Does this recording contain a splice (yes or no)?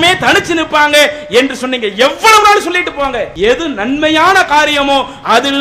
yes